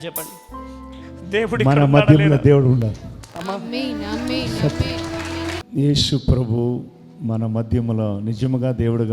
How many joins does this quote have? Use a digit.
1